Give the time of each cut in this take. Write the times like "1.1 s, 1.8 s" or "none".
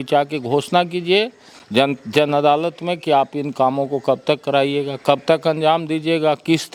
none